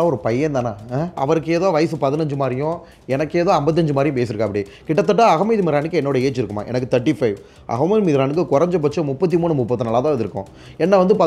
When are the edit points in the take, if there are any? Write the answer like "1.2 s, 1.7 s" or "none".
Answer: 1.2 s